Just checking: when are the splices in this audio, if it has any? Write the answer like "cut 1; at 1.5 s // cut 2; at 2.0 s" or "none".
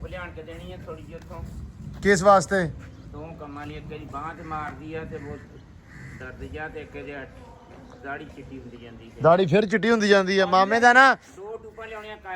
none